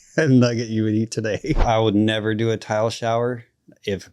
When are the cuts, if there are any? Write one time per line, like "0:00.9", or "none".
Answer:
0:01.6